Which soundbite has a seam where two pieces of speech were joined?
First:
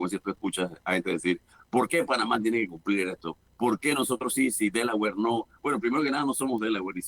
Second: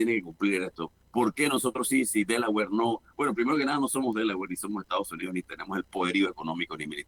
first; 1 cut; at 1.5 s

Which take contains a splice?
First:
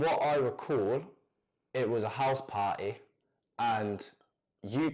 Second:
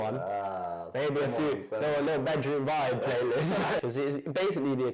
second; 1 cut; at 3.8 s

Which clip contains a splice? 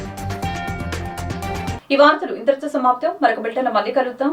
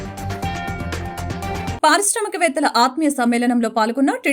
second; 1 cut; at 1.8 s

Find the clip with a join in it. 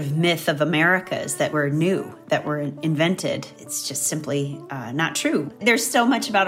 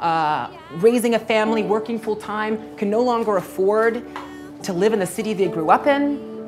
first; 2 cuts; at 3.5 s, 5.5 s

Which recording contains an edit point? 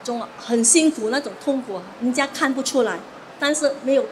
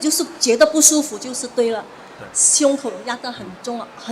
first; 1 cut; at 1.8 s

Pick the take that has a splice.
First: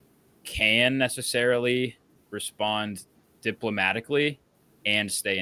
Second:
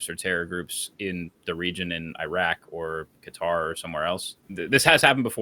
second; 1 cut; at 4.4 s

